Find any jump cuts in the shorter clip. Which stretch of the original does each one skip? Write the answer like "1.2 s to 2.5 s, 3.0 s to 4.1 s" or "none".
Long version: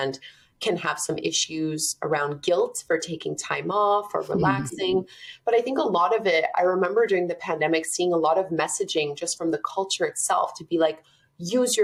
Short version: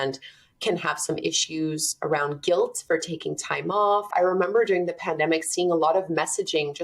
4.1 s to 6.5 s